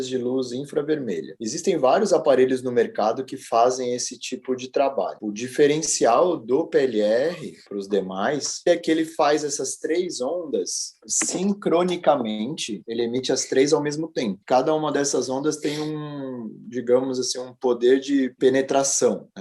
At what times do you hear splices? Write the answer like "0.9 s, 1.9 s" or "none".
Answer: 8.7 s